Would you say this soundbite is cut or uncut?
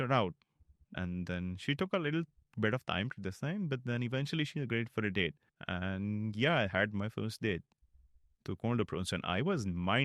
uncut